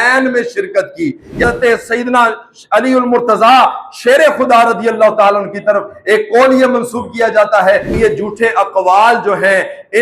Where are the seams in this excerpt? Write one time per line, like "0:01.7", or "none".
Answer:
0:01.4
0:07.9